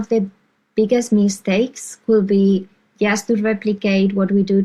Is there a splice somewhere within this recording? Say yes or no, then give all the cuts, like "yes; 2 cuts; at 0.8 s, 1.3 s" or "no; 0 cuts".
no; 0 cuts